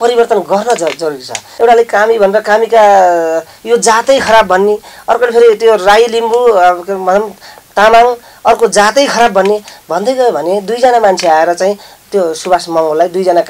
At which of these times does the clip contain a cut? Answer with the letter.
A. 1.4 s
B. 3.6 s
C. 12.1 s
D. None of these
A